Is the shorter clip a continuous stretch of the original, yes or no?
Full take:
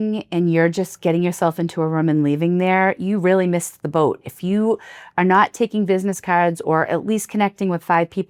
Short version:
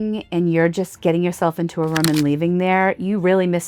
yes